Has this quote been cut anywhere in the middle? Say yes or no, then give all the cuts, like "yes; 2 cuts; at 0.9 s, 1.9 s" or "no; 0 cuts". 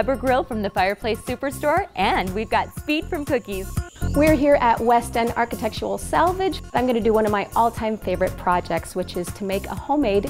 yes; 2 cuts; at 3.8 s, 6.7 s